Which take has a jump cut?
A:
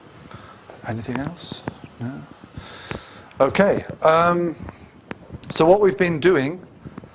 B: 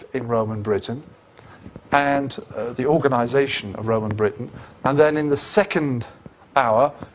B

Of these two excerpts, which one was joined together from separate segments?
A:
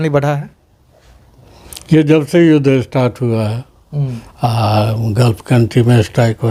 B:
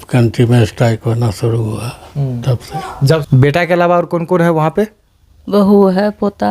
B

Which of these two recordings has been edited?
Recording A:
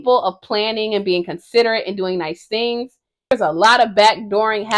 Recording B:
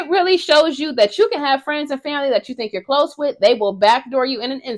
A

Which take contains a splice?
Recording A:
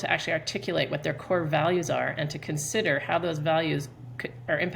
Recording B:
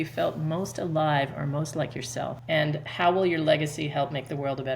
B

